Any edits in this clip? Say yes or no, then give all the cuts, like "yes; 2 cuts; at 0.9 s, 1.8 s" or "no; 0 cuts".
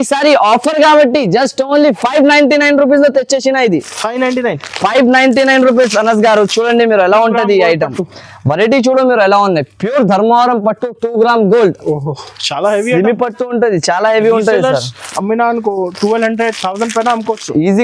no; 0 cuts